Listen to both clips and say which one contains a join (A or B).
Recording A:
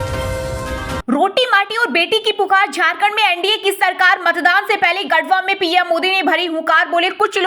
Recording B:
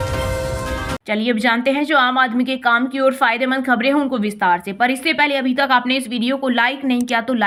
A